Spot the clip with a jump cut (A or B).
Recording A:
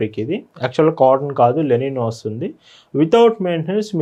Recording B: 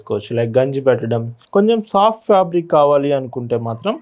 B